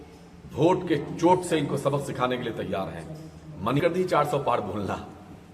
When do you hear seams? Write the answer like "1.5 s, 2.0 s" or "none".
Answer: 3.8 s